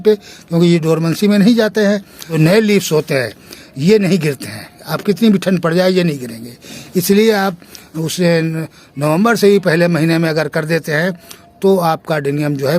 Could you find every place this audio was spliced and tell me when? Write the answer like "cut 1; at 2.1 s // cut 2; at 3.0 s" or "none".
cut 1; at 2.2 s

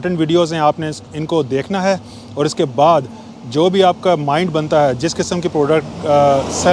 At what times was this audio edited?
none

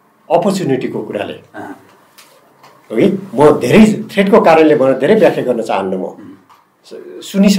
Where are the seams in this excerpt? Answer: none

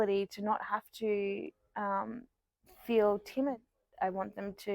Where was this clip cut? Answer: cut 1; at 3.5 s

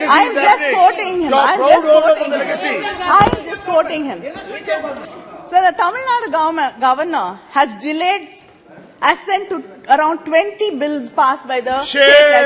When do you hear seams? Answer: cut 1; at 5.0 s

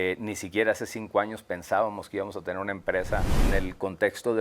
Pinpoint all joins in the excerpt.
cut 1; at 3.4 s

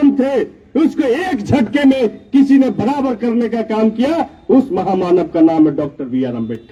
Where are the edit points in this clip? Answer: none

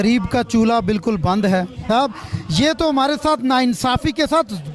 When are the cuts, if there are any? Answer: cut 1; at 1.9 s

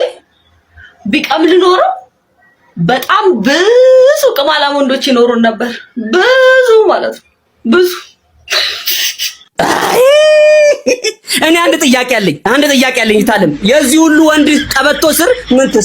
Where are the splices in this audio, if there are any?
none

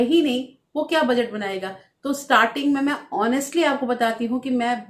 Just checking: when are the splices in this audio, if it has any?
none

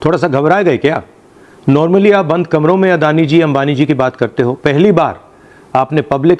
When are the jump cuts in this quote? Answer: none

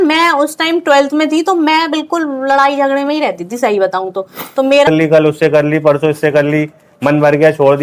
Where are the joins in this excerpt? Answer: cut 1; at 4.9 s

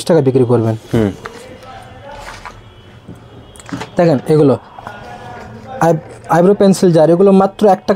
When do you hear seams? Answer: none

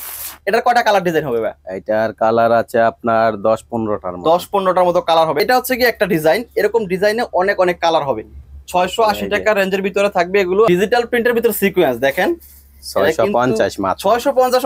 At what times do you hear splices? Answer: cut 1; at 5.4 s // cut 2; at 10.7 s

